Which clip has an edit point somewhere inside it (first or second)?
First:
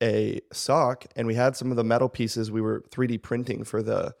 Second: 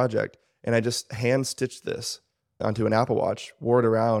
second